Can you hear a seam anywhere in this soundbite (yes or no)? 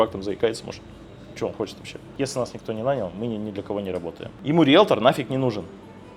yes